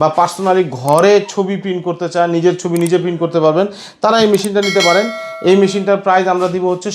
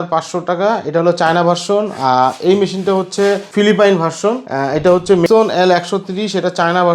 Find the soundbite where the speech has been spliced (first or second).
second